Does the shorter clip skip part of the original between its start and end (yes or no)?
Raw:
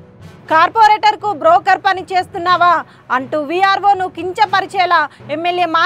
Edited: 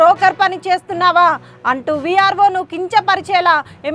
no